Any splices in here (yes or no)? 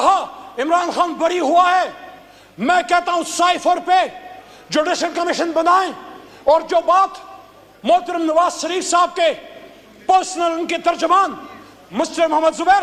no